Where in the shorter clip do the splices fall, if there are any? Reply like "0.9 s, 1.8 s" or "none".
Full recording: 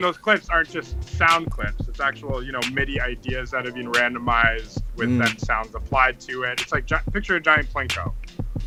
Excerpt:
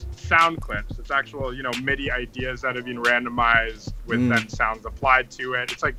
none